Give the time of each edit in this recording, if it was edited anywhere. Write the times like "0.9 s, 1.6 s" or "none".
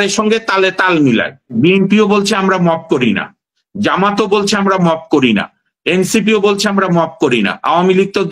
1.5 s